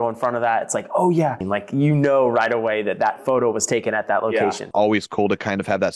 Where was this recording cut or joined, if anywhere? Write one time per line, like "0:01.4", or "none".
0:01.4
0:04.6